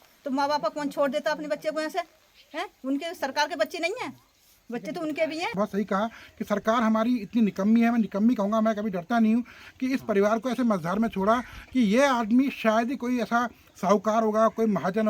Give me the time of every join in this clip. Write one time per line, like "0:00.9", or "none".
0:05.5